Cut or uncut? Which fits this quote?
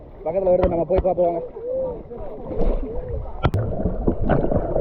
cut